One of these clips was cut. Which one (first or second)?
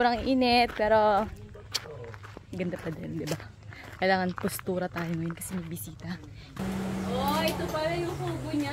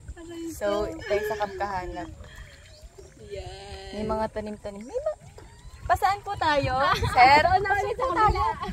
first